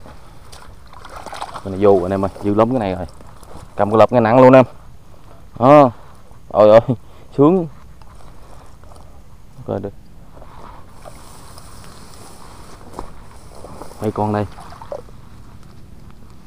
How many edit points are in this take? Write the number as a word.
one